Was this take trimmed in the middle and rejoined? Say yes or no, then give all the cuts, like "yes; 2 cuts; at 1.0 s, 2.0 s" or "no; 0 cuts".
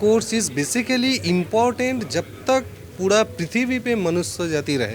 no; 0 cuts